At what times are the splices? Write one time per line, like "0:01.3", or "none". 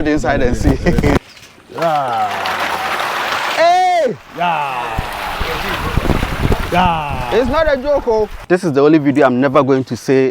0:08.4